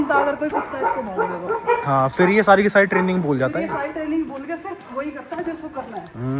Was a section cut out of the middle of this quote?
no; 0 cuts

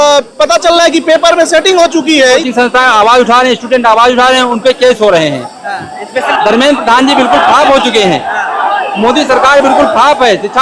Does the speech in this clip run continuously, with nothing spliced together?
no; 2 cuts; at 2.4 s, 6.2 s

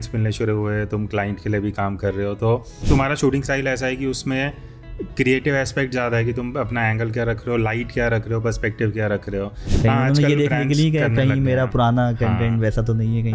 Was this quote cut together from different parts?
yes; 2 cuts; at 2.7 s, 9.6 s

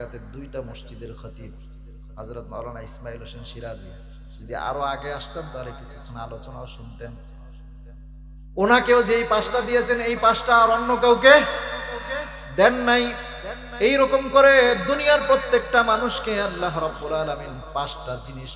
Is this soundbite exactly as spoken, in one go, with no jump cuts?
yes; 0 cuts

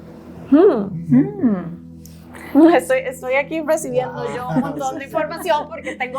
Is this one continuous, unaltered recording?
yes; 0 cuts

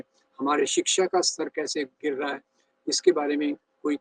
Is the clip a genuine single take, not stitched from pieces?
yes; 0 cuts

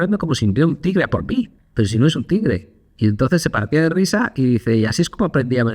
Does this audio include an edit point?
yes; 1 cut; at 1.6 s

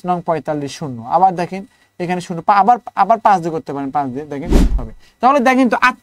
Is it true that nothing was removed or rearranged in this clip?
no; 1 cut; at 4.8 s

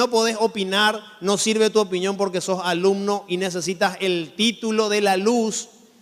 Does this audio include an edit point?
yes; 1 cut; at 2.7 s

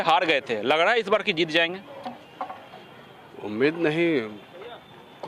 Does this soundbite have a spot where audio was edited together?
no; 0 cuts

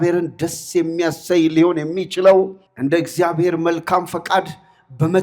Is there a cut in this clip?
yes; 1 cut; at 2.6 s

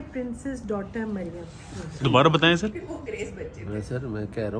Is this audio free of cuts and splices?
no; 1 cut; at 2.0 s

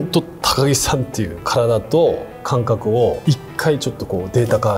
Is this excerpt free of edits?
no; 2 cuts; at 1.4 s, 3.2 s

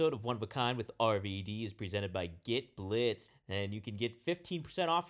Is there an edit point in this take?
yes; 1 cut; at 3.3 s

